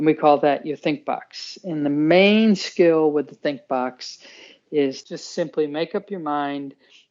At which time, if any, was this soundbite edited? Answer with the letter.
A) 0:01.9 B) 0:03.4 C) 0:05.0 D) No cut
C